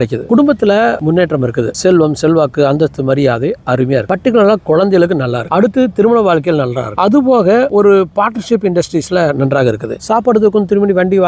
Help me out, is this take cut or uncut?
uncut